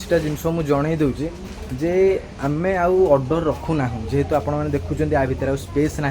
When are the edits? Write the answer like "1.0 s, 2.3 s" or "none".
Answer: none